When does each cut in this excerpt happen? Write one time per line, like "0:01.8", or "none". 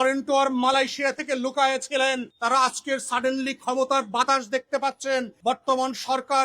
0:02.3
0:05.3